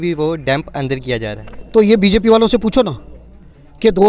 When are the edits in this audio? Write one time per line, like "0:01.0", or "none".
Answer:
none